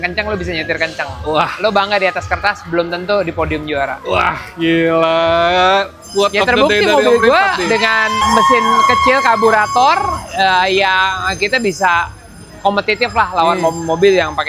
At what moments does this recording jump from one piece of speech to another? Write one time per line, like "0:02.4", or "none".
none